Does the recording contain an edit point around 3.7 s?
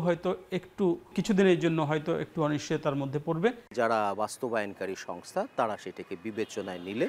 yes; 2 cuts; at 1.1 s, 3.7 s

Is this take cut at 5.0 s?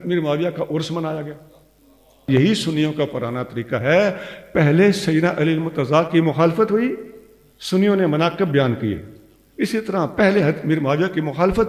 no; 1 cut; at 2.2 s

